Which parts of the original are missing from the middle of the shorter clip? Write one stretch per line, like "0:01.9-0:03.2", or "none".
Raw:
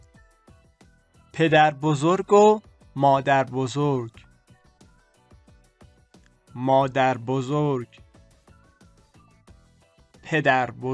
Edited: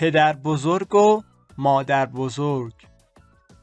0:04.1-0:08.0